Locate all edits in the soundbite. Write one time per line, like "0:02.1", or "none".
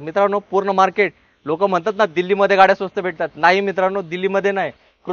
none

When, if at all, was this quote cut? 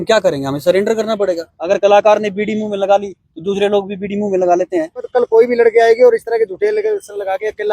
0:01.6
0:05.1

